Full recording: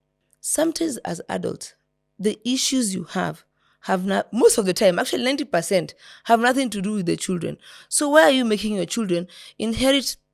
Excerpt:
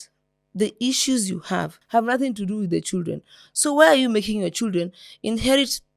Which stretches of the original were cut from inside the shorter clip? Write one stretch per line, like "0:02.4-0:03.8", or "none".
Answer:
0:03.4-0:06.1